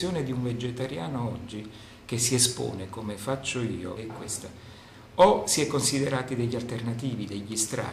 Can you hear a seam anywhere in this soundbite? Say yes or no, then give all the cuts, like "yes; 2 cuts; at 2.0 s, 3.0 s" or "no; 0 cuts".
yes; 1 cut; at 4.0 s